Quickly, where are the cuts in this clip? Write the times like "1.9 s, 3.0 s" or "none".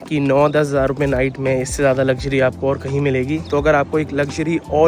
3.5 s